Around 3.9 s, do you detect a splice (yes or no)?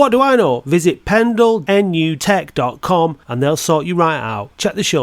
no